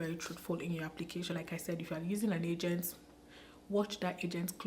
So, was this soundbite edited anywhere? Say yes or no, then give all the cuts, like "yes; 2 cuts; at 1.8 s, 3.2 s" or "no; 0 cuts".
yes; 1 cut; at 1.3 s